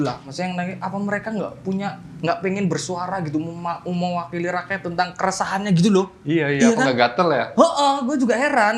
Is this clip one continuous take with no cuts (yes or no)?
yes